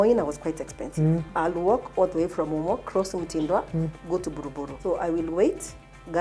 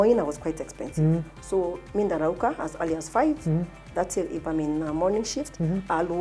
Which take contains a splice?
first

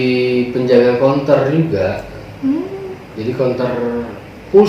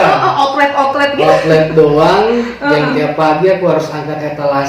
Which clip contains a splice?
first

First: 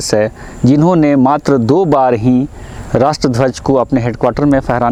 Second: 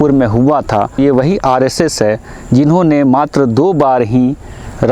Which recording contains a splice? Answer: second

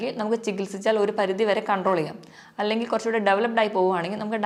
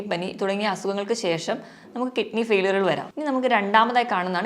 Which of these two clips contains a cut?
second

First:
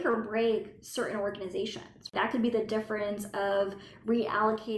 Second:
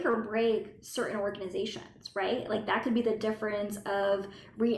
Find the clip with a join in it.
first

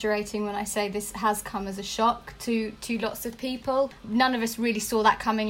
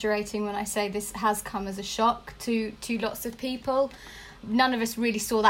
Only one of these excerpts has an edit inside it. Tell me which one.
first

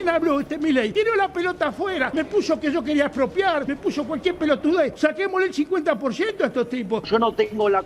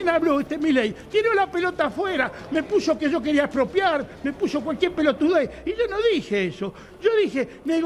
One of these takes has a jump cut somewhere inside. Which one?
first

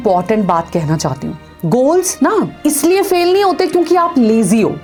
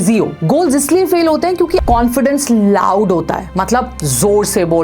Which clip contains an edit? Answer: second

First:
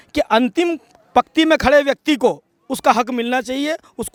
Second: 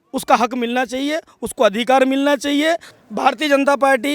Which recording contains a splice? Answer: second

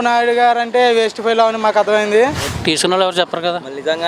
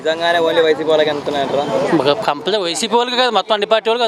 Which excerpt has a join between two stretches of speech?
first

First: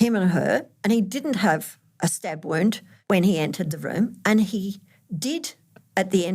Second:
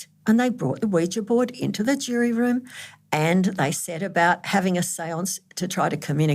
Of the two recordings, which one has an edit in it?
first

